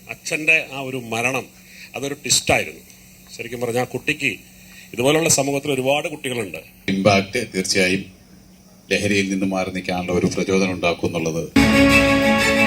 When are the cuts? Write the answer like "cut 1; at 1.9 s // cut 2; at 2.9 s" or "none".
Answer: cut 1; at 6.9 s // cut 2; at 11.6 s